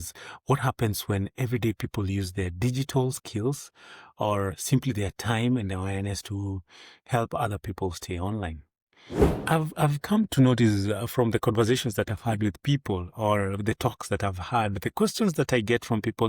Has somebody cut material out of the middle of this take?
yes; 1 cut; at 9.2 s

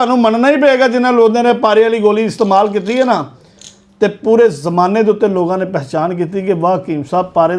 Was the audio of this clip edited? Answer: no; 0 cuts

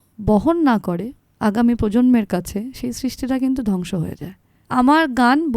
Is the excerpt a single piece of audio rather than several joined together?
no; 1 cut; at 4.5 s

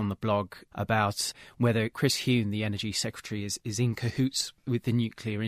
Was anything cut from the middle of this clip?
yes; 2 cuts; at 1.9 s, 4.6 s

